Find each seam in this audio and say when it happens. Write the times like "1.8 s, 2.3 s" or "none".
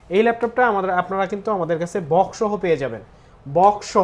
none